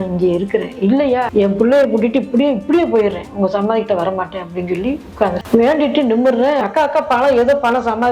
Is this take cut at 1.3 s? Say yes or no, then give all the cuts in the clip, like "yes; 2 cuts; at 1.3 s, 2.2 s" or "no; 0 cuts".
yes; 2 cuts; at 1.3 s, 6.6 s